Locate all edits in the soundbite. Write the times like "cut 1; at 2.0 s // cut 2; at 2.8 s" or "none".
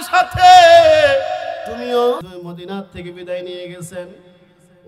cut 1; at 2.2 s